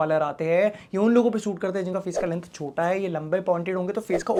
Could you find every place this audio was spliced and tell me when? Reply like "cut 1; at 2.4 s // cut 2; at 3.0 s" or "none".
none